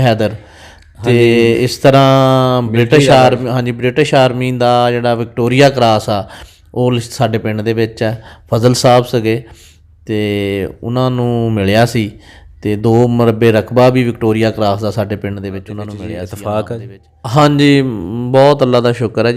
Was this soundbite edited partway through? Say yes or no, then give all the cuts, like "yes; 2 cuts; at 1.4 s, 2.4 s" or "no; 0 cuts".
yes; 1 cut; at 16.2 s